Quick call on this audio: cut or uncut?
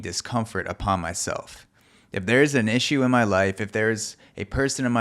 uncut